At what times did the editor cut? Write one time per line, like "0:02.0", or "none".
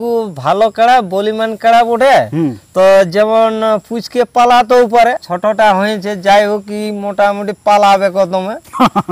0:05.3